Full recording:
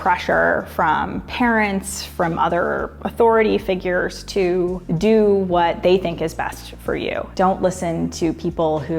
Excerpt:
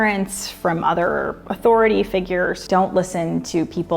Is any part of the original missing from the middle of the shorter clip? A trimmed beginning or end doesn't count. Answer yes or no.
yes